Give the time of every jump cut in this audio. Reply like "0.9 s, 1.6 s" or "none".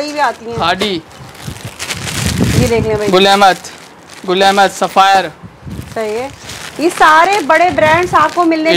none